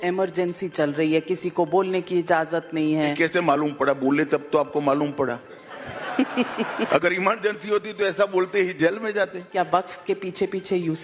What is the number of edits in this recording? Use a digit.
2